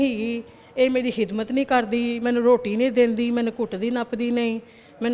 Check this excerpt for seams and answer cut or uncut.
uncut